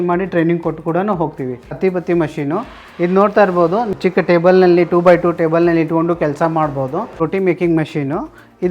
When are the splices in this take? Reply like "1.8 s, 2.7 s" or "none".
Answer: 1.8 s, 3.9 s, 7.2 s